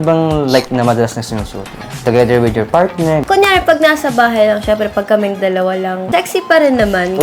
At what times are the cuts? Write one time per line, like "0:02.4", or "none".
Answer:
0:02.0
0:03.2
0:06.1